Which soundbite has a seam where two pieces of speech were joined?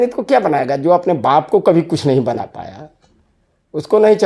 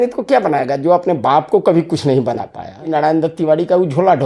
second; 1 cut; at 2.9 s

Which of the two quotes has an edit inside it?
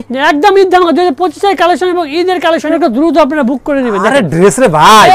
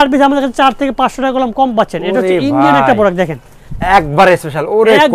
first; 1 cut; at 2.7 s

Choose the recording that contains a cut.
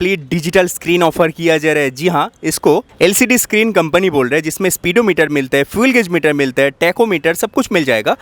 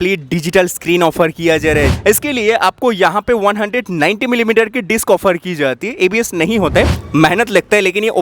second; 2 cuts; at 1.9 s, 7.0 s

